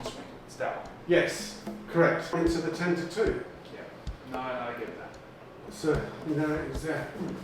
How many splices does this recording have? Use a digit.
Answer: 1